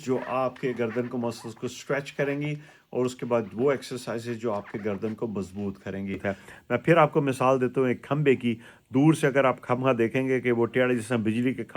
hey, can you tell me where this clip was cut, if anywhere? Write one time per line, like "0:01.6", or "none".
0:06.2